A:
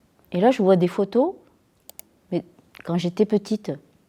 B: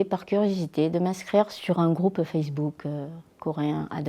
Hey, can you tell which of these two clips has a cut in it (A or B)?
B